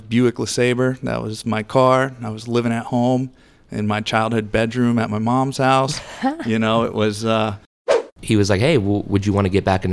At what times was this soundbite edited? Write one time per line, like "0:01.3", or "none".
0:08.1